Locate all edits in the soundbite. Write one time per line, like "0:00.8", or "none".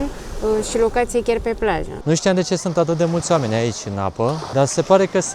0:01.9
0:04.4